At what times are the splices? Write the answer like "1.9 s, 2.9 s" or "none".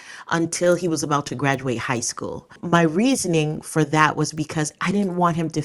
2.5 s